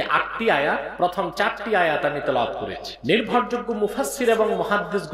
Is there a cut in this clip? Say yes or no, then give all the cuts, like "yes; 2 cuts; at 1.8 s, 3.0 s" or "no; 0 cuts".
yes; 2 cuts; at 0.9 s, 2.9 s